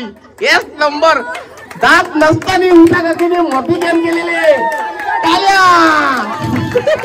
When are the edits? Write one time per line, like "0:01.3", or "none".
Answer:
none